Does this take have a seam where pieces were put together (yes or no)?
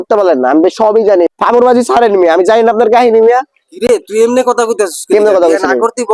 no